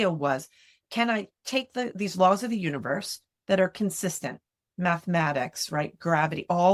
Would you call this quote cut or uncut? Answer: uncut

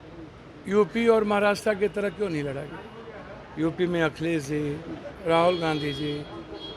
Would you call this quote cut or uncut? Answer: cut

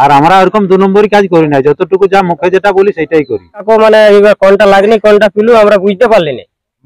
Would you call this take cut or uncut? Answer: cut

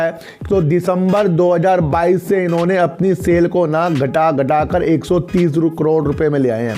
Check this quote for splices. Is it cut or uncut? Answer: uncut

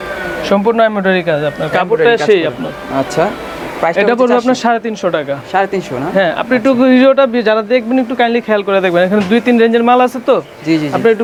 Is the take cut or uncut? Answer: uncut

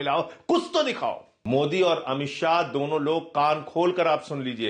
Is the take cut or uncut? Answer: cut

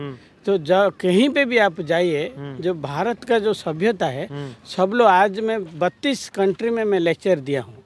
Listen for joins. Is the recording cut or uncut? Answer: uncut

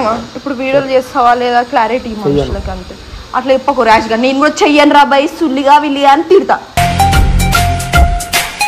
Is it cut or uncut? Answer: uncut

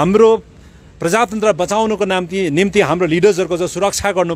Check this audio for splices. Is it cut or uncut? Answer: uncut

